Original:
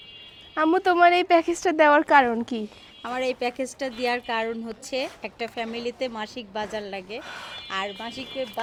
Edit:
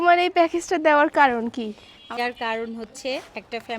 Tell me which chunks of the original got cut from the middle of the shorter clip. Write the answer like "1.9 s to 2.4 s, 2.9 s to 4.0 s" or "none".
3.1 s to 4.1 s